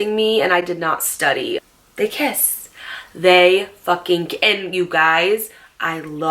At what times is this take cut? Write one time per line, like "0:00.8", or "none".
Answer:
0:01.6